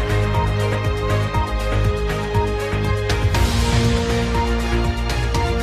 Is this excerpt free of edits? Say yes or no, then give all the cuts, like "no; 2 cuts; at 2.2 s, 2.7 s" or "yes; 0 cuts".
no; 1 cut; at 3.2 s